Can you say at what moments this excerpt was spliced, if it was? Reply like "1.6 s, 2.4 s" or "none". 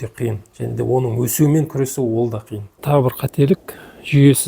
2.8 s